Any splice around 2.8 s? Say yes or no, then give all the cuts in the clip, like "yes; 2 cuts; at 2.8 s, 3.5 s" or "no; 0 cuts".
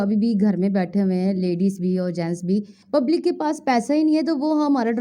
yes; 1 cut; at 2.8 s